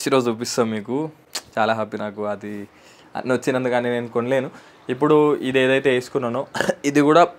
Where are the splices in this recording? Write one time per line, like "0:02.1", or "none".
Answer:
none